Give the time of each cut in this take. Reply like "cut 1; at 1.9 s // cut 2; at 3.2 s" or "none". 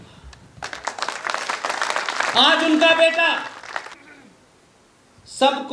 cut 1; at 4.0 s